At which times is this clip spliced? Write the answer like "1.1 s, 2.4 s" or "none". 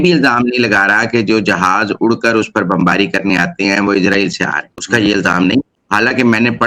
none